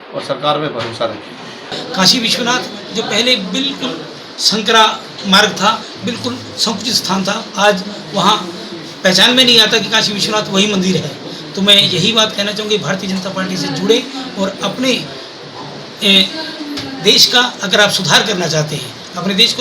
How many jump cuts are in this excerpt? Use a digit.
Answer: 1